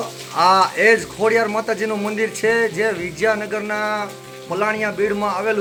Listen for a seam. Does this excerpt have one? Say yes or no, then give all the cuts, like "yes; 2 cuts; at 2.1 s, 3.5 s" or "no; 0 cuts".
no; 0 cuts